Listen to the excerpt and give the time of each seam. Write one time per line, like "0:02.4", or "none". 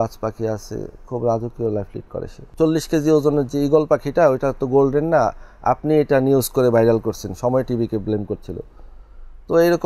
0:02.6